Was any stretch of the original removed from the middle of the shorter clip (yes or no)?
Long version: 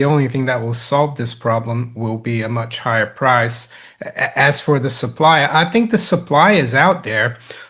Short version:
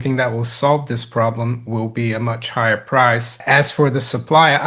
yes